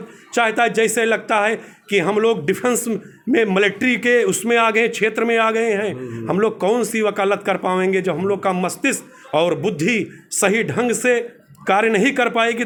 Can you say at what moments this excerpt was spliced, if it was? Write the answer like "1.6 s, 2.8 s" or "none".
none